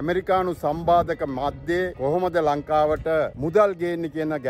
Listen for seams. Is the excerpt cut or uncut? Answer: cut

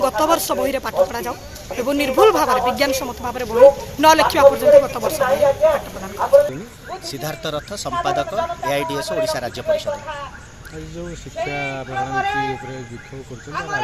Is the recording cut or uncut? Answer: uncut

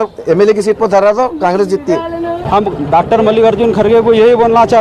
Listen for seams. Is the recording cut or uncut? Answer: cut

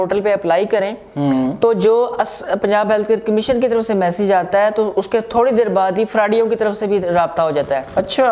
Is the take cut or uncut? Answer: uncut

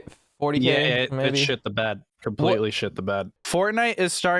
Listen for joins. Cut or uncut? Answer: cut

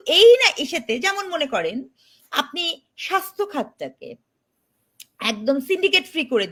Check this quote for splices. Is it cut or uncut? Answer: uncut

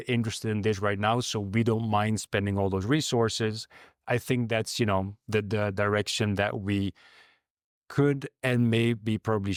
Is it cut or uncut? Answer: uncut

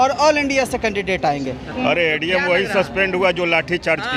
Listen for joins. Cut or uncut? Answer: cut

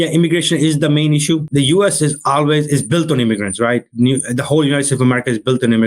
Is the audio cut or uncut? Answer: cut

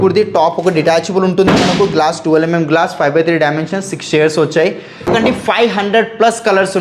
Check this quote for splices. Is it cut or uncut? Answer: cut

